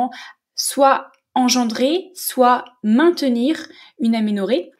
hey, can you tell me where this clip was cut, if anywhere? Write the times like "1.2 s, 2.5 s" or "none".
none